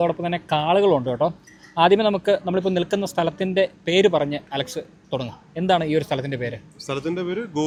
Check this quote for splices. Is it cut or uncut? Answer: uncut